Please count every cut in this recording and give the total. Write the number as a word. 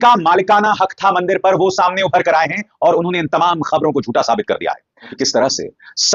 one